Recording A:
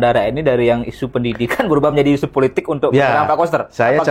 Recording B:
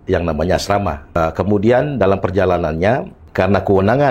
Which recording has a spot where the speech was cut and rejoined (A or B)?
B